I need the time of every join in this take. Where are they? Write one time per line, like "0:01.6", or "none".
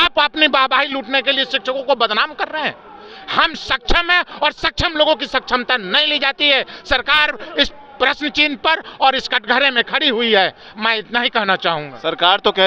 none